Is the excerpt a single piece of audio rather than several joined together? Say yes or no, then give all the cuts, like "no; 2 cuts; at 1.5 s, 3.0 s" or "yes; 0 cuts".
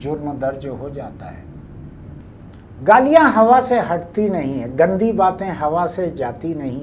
no; 1 cut; at 2.2 s